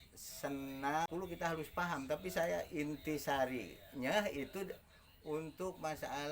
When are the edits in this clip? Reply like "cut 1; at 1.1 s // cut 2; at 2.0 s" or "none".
cut 1; at 1.1 s